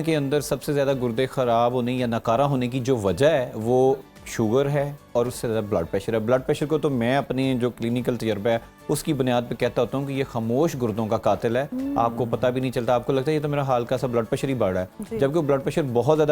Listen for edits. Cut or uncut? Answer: uncut